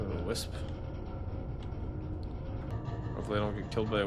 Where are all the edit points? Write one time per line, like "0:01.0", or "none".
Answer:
0:02.7